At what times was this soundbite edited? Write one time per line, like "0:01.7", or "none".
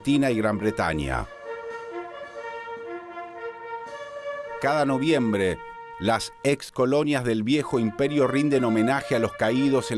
none

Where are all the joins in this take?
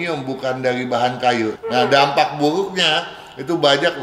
0:01.6

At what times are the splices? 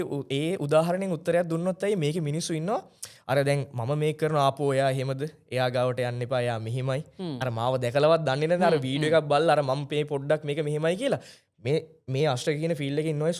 none

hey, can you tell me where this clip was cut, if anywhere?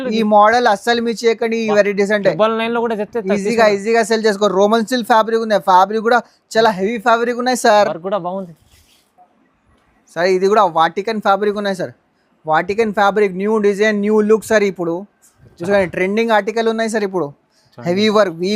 none

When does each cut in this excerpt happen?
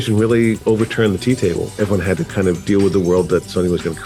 none

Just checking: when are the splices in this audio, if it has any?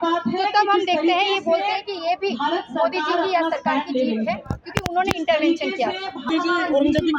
0:06.3

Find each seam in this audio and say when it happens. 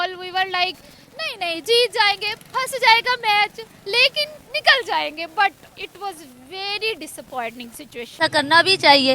0:08.2

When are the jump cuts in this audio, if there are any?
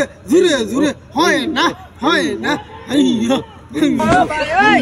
none

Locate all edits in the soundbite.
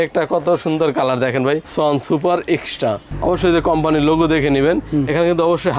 0:01.6

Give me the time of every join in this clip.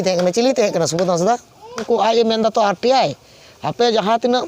0:01.8

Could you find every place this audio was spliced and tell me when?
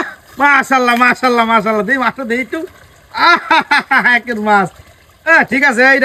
none

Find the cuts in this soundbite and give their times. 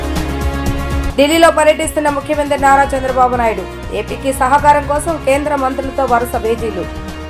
0:00.9

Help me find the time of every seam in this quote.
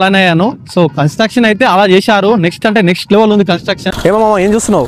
0:03.9

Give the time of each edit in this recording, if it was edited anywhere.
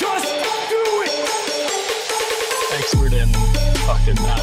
none

